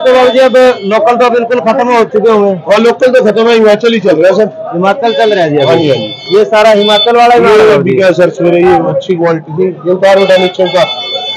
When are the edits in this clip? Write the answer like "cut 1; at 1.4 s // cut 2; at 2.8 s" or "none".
none